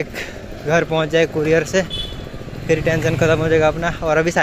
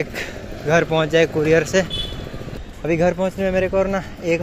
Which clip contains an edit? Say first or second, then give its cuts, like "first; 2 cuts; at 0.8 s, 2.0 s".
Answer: second; 1 cut; at 2.5 s